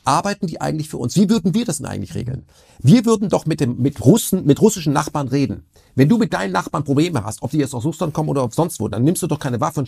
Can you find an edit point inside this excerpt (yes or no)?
no